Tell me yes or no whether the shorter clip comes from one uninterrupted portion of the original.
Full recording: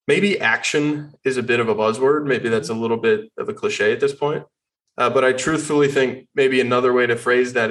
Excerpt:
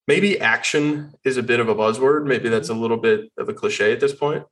yes